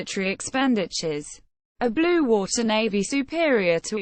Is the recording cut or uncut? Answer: uncut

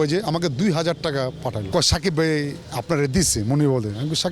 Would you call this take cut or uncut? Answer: cut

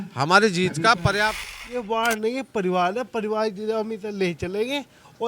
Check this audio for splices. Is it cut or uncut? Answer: cut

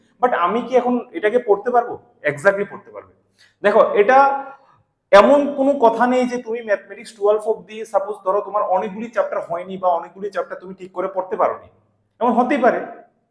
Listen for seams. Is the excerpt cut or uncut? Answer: uncut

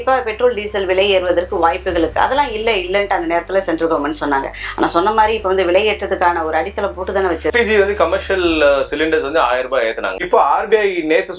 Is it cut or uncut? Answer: cut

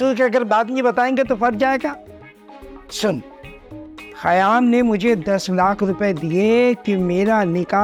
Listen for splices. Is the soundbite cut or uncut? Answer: uncut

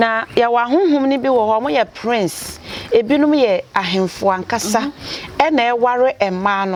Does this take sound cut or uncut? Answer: uncut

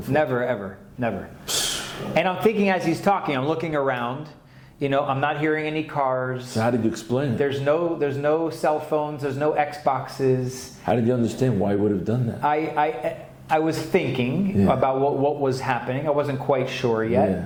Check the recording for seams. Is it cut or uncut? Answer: uncut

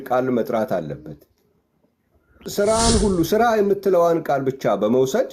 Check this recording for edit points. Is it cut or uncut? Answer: cut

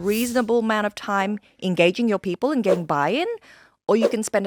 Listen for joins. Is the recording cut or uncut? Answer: uncut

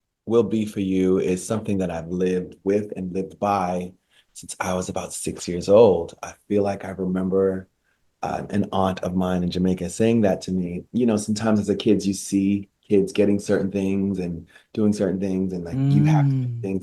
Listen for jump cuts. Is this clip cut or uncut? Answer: uncut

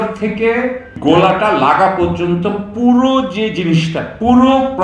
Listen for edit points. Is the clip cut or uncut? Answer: cut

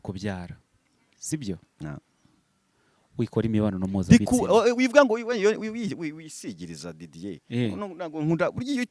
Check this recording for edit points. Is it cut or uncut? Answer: uncut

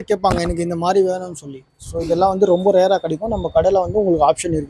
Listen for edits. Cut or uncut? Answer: uncut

